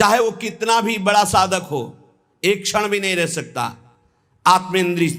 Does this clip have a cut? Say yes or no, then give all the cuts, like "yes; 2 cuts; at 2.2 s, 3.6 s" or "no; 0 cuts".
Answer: no; 0 cuts